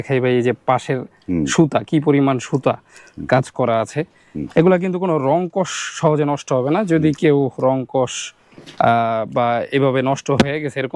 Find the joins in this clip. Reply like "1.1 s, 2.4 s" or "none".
none